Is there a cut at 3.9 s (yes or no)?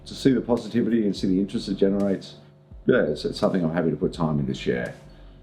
no